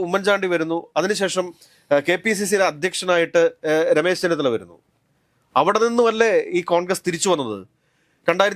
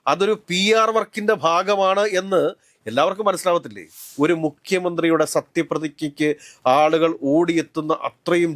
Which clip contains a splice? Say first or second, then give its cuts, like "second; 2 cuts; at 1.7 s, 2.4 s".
second; 1 cut; at 4.0 s